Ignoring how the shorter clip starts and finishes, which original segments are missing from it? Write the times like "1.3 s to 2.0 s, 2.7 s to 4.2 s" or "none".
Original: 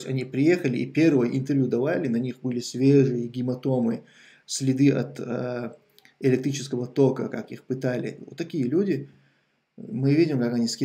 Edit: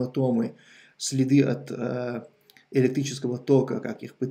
none